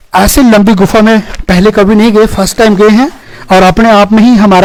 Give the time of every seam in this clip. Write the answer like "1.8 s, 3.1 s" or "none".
none